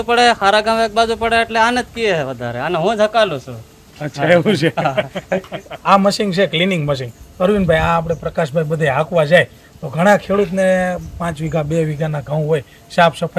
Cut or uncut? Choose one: uncut